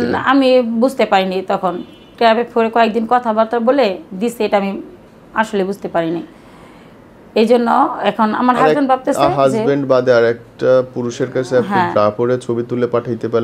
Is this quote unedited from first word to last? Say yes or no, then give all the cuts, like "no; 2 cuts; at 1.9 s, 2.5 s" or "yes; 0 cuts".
yes; 0 cuts